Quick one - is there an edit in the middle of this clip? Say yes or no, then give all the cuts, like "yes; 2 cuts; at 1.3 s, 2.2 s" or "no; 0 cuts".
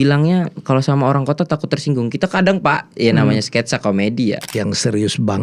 yes; 1 cut; at 4.4 s